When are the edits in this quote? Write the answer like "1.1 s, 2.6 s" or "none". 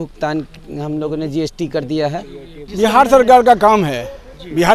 2.6 s